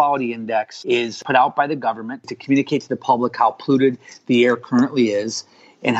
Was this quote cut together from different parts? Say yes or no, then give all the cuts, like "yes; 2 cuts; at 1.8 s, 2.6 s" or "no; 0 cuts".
yes; 2 cuts; at 1.2 s, 2.4 s